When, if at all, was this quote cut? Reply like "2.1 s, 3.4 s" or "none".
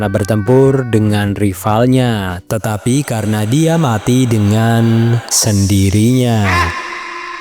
6.5 s